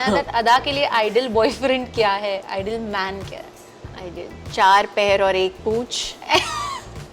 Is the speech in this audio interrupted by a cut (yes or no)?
no